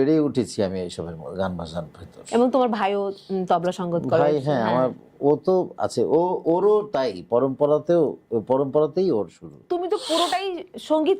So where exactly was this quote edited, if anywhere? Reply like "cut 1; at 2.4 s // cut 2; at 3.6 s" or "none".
cut 1; at 9.6 s